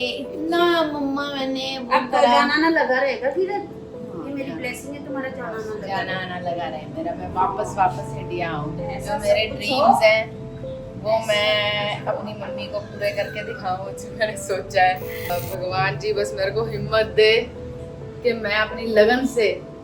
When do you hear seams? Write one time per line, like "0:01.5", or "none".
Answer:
0:15.3